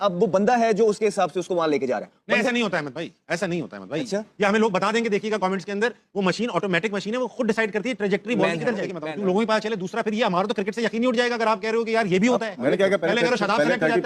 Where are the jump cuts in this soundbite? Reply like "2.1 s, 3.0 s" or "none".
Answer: 9.0 s